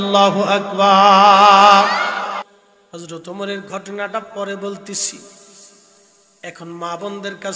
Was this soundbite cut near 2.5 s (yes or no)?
yes